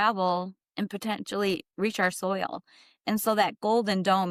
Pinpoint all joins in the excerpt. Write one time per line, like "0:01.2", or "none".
none